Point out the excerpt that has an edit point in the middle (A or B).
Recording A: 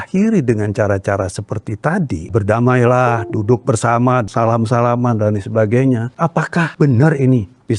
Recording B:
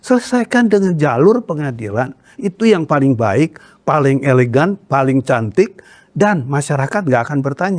A